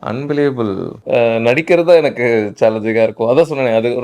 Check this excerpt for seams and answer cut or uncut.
cut